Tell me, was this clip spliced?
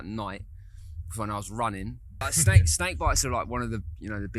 yes; 1 cut; at 2.2 s

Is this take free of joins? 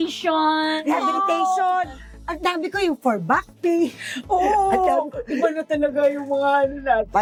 yes; 0 cuts

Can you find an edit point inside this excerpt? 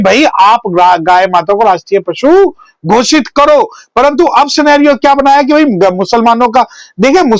no; 0 cuts

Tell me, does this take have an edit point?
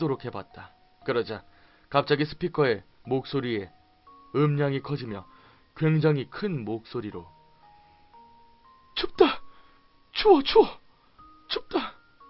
no; 0 cuts

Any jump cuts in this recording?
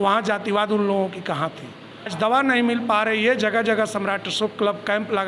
yes; 1 cut; at 2.1 s

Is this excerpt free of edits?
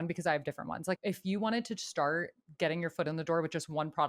no; 1 cut; at 1.0 s

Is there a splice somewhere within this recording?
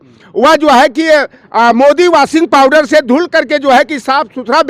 no; 0 cuts

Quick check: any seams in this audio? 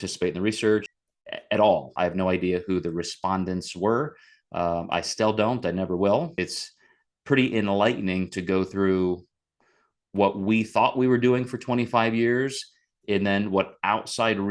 yes; 3 cuts; at 1.0 s, 1.9 s, 6.3 s

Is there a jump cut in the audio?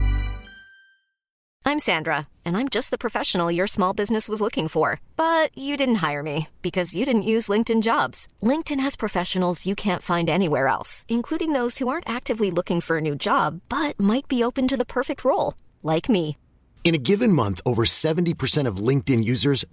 yes; 1 cut; at 1.3 s

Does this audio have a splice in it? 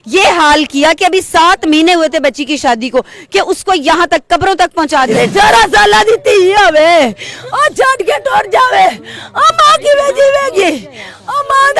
yes; 1 cut; at 5.1 s

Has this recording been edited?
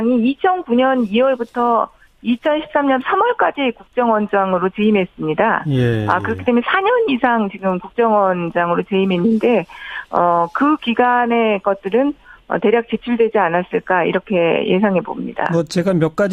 yes; 1 cut; at 10.5 s

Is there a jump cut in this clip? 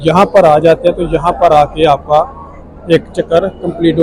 no; 0 cuts

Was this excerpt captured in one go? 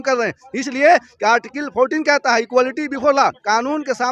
yes; 0 cuts

